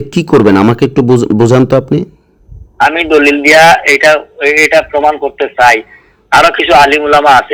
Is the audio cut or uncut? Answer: uncut